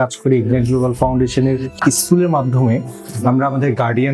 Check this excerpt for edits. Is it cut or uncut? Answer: cut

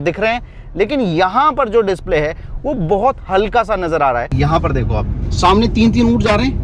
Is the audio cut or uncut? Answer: cut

